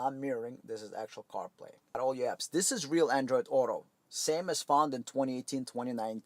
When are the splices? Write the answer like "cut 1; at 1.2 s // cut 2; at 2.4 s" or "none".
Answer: cut 1; at 2.0 s

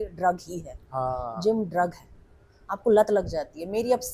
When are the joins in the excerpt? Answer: none

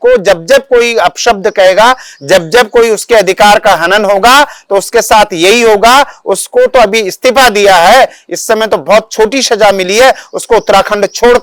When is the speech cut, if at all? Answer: none

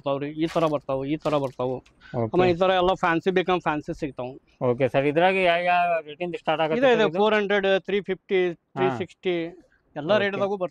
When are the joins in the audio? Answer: none

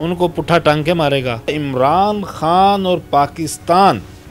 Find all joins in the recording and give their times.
cut 1; at 1.6 s

